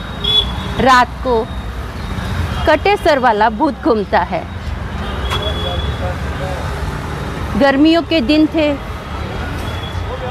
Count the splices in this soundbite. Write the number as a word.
zero